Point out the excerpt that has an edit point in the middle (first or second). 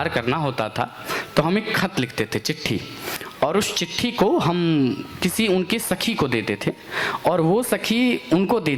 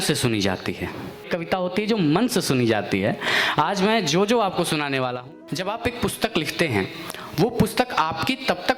second